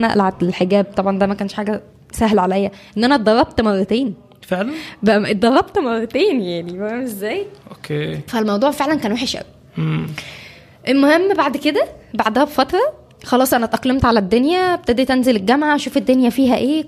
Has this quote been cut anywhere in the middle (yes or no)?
no